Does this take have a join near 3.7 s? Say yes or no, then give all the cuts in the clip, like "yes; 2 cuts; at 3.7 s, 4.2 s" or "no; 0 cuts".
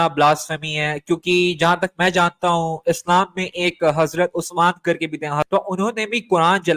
no; 1 cut; at 5.5 s